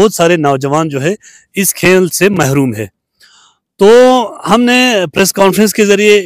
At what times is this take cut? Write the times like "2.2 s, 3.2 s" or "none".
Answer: none